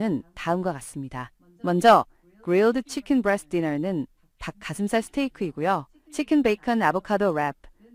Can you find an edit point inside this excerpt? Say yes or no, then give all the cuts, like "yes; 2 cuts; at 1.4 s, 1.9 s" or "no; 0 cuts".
no; 0 cuts